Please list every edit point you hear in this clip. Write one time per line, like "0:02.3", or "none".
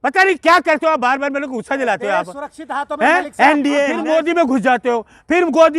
0:04.2